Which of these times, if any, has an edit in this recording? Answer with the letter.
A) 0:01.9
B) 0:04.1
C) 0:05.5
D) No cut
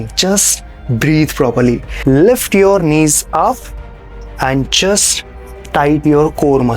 A